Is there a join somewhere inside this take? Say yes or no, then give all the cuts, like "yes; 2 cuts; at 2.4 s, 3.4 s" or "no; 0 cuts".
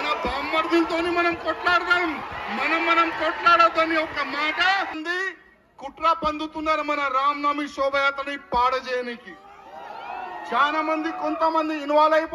yes; 1 cut; at 5.0 s